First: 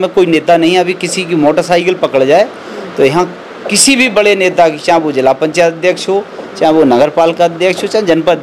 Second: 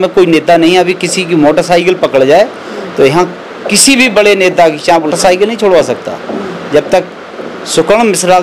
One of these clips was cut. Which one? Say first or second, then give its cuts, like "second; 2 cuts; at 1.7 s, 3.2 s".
second; 1 cut; at 5.1 s